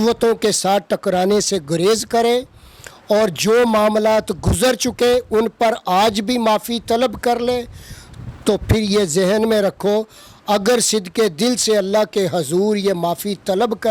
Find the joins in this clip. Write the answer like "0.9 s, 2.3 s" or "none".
none